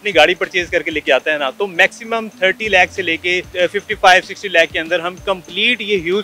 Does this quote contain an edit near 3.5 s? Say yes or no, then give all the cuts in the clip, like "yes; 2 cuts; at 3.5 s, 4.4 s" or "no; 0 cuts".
yes; 1 cut; at 3.5 s